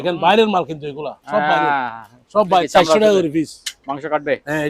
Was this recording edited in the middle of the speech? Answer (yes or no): yes